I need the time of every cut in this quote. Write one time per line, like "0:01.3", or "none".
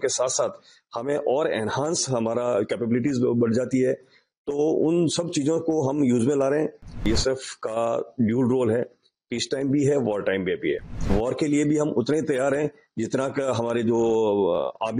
0:07.1
0:11.1